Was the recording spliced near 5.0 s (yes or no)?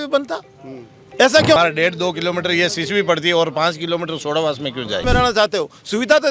yes